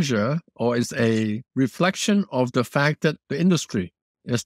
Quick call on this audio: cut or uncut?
cut